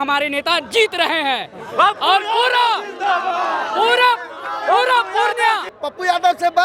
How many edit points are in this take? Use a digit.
1